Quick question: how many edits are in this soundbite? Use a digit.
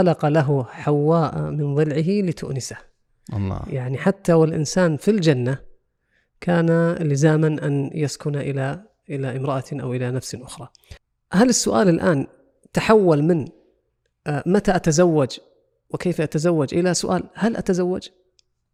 0